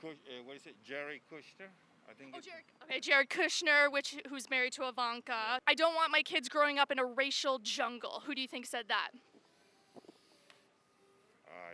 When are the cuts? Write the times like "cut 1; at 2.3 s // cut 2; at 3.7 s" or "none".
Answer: cut 1; at 5.6 s